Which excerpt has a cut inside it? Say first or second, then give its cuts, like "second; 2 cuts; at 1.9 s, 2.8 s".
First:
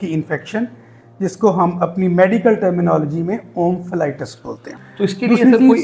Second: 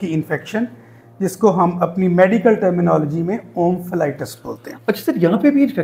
first; 1 cut; at 4.7 s